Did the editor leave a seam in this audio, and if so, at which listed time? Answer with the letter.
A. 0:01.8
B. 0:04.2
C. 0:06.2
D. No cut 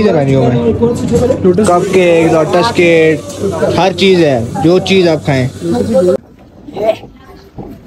C